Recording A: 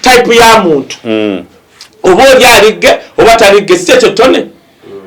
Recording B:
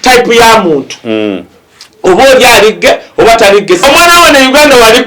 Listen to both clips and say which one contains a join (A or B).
B